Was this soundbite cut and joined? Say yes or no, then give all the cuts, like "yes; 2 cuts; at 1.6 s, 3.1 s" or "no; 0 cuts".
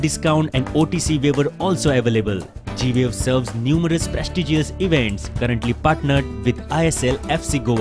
yes; 1 cut; at 6.8 s